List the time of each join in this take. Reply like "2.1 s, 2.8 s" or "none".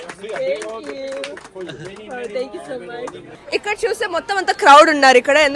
3.3 s